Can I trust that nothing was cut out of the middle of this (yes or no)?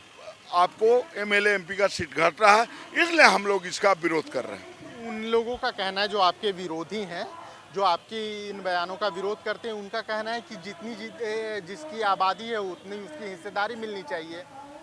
yes